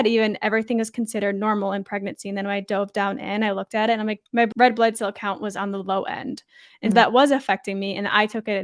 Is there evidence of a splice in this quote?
yes; 1 cut; at 4.5 s

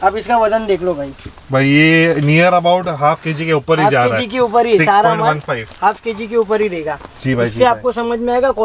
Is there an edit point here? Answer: no; 0 cuts

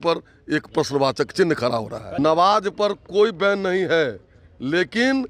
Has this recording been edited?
yes; 1 cut; at 2.2 s

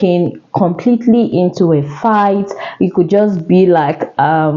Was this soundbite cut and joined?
no; 0 cuts

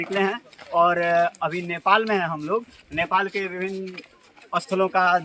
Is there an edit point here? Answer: no; 0 cuts

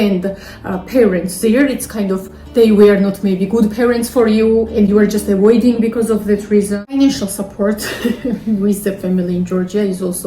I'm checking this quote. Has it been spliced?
yes; 1 cut; at 6.8 s

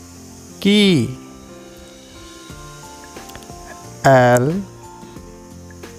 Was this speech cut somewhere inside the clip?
yes; 2 cuts; at 1.8 s, 4.0 s

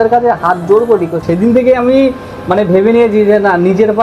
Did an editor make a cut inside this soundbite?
yes; 1 cut; at 1.2 s

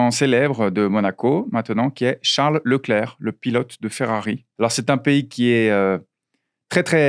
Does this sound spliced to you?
yes; 1 cut; at 4.5 s

